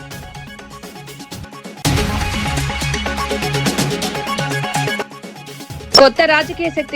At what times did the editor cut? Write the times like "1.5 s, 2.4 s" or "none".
0.9 s, 1.7 s, 4.9 s